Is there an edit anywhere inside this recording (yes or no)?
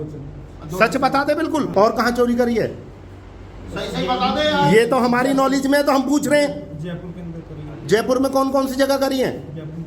yes